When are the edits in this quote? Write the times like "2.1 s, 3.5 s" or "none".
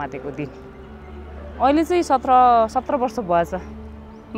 none